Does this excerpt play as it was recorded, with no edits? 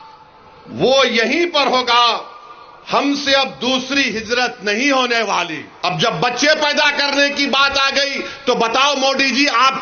no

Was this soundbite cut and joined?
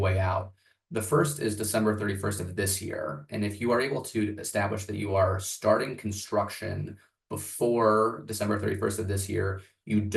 no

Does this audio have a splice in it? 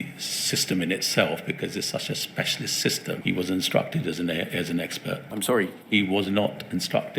yes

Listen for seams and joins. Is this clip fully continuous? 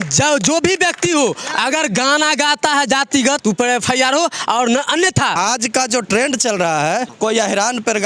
no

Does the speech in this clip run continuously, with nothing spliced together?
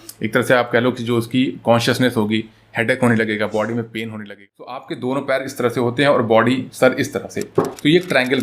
no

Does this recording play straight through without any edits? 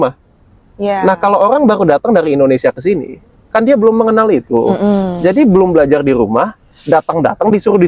yes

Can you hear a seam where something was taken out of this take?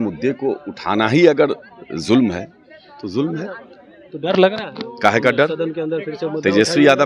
no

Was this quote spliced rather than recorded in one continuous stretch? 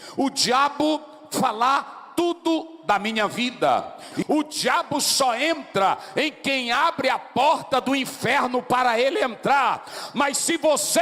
yes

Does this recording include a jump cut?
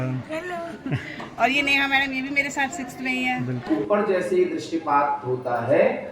yes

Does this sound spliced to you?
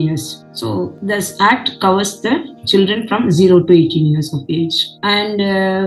no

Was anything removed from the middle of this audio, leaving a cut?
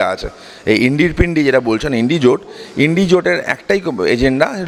no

